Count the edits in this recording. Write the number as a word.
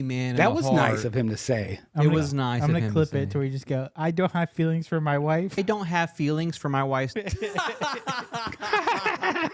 two